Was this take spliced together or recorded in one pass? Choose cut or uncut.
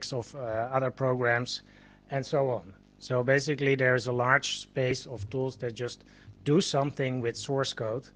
cut